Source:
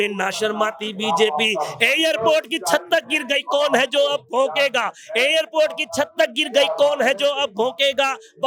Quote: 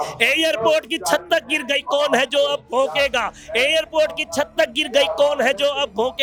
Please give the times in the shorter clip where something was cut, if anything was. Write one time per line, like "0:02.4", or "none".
none

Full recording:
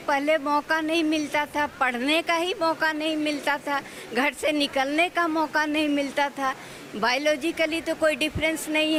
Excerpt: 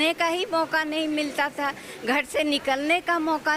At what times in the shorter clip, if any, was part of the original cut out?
none

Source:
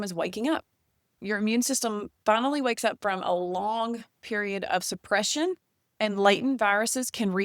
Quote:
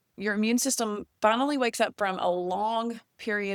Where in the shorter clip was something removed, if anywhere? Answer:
none

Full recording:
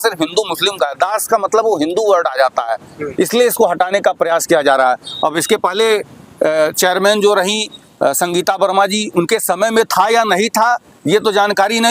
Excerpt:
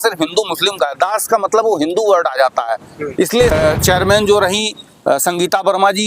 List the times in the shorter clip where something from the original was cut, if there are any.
0:03.5

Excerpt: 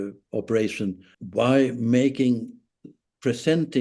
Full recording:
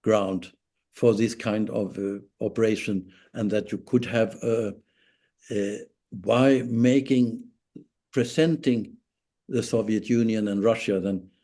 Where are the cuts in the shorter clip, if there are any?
0:01.1

